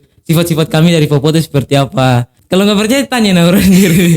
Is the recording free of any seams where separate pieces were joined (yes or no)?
no